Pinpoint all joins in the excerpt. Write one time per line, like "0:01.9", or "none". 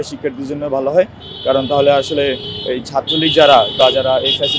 none